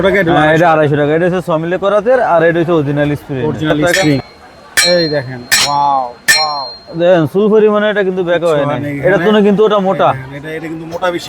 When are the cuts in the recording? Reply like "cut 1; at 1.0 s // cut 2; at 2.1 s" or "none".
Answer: cut 1; at 4.2 s